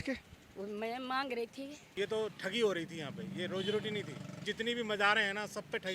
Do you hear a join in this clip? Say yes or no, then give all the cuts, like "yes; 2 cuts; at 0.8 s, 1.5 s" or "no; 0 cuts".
yes; 2 cuts; at 1.9 s, 4.4 s